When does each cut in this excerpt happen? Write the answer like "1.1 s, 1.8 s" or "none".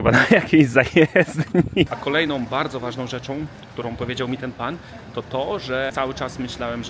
1.9 s, 5.9 s